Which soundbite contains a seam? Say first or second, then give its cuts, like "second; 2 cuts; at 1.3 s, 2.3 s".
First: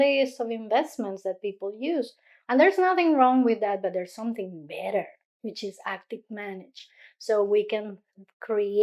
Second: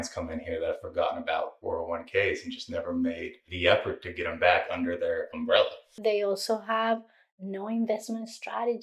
second; 2 cuts; at 1.6 s, 5.9 s